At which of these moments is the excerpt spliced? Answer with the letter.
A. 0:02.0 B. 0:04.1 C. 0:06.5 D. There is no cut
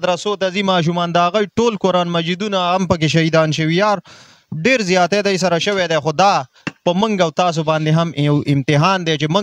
D